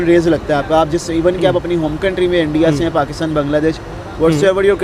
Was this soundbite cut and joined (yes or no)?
no